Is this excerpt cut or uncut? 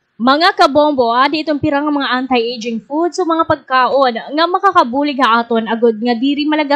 cut